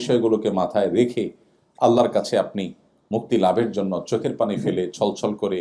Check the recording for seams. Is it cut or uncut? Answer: uncut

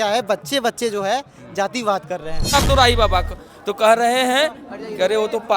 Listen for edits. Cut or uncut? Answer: cut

